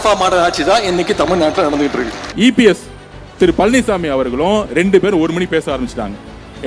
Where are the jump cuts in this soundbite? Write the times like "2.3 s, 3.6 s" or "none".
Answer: 2.3 s